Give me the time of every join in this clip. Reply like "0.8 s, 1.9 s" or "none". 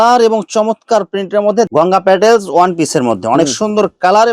1.7 s